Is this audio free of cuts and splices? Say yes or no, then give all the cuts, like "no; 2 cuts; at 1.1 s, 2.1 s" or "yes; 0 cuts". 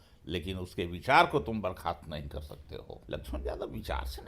no; 1 cut; at 3.0 s